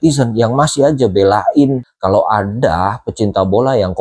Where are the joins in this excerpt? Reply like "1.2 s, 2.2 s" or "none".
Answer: 1.9 s